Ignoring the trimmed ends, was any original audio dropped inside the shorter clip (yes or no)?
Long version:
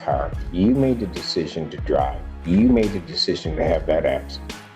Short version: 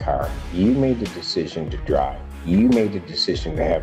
no